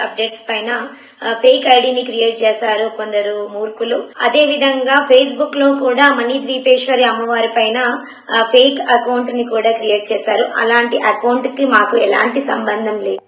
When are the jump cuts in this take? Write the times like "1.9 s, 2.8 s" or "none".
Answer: 4.1 s

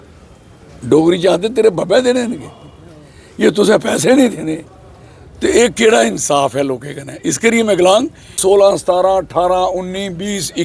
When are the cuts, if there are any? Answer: 8.4 s

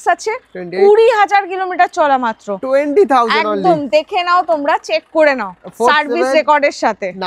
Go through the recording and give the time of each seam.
none

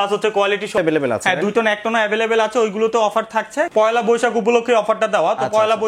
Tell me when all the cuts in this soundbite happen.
0.8 s, 3.7 s

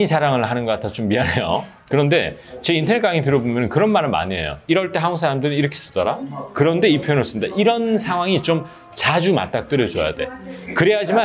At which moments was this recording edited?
none

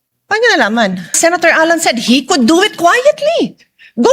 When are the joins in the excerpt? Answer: 1.2 s

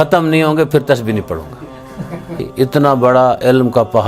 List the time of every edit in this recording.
2.5 s

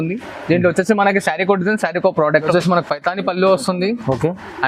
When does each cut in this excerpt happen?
2.5 s

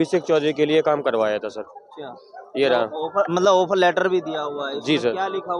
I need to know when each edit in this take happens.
none

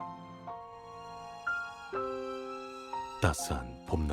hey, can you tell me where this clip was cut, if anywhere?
3.1 s

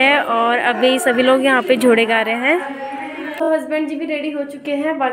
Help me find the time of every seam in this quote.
3.4 s

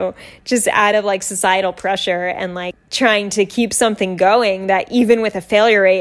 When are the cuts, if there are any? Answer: 2.7 s

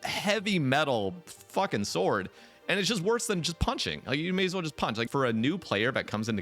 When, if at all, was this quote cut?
5.1 s

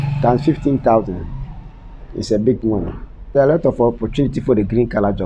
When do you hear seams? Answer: 3.3 s

